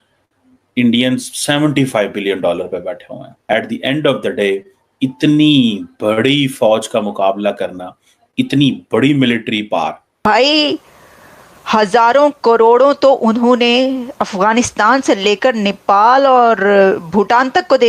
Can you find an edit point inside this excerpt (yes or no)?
yes